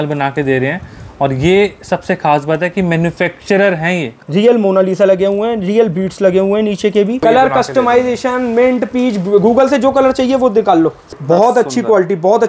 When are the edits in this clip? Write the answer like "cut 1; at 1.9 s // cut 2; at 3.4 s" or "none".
cut 1; at 4.1 s // cut 2; at 7.2 s // cut 3; at 11.1 s